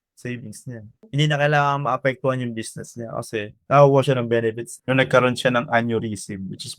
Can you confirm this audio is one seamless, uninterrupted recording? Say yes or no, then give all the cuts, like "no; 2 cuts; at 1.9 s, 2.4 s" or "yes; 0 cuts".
no; 3 cuts; at 1.0 s, 3.6 s, 4.7 s